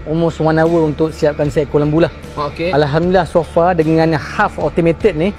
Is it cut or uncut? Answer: cut